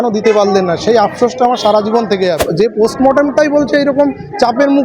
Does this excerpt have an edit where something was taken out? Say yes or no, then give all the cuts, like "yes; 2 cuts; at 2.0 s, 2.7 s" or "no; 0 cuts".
yes; 1 cut; at 2.5 s